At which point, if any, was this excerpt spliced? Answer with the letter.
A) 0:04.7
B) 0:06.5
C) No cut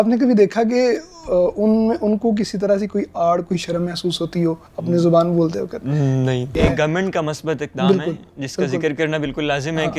B